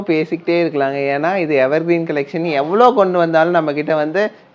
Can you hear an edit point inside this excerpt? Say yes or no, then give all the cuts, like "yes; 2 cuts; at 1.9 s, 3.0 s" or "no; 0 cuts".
no; 0 cuts